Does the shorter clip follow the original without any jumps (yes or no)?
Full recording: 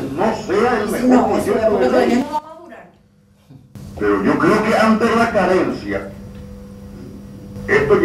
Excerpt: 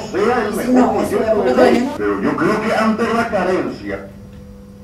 no